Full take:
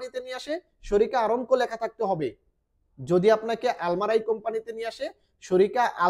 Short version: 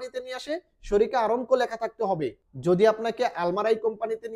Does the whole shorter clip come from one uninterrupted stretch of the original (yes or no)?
no